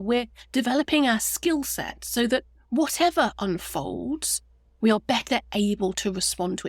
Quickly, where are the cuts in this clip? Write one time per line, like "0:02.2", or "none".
none